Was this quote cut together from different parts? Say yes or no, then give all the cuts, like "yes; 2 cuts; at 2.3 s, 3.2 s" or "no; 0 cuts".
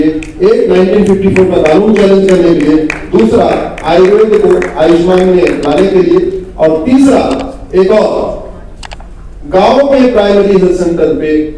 no; 0 cuts